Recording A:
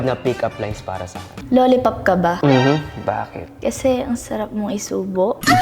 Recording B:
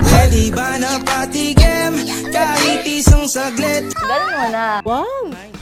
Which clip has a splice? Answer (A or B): A